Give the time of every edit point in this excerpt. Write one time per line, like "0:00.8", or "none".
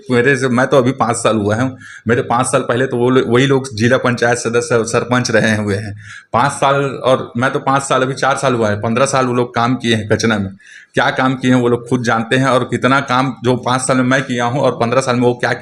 none